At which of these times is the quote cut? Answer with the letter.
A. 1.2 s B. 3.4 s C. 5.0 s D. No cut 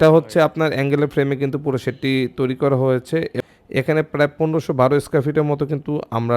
B